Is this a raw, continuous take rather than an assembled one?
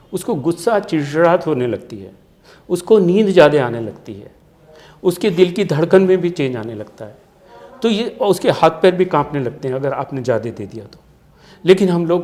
yes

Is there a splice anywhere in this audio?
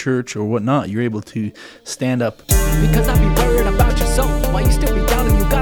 yes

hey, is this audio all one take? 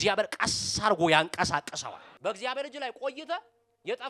no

